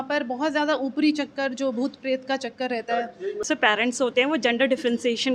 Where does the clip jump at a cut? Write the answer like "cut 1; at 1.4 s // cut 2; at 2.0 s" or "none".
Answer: cut 1; at 3.5 s